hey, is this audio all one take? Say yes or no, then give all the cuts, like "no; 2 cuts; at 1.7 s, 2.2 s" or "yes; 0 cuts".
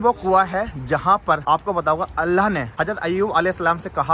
no; 2 cuts; at 1.4 s, 2.7 s